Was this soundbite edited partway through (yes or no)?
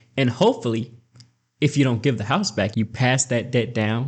yes